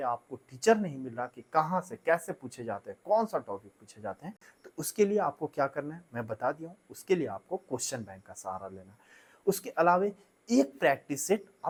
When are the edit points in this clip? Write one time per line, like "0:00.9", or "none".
none